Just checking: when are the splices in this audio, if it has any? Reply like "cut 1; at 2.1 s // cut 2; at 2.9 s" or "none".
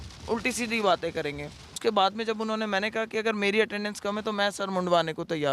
cut 1; at 1.7 s